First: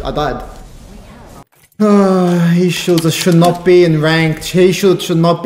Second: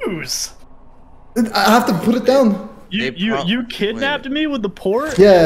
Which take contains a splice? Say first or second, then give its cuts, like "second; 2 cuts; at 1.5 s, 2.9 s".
first; 1 cut; at 1.5 s